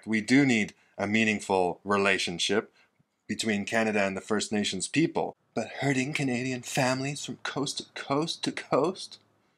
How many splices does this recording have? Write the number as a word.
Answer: one